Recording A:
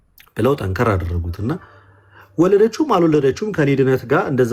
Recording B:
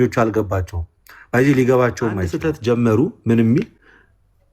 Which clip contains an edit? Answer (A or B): B